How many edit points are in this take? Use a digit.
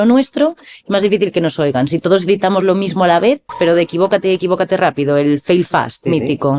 1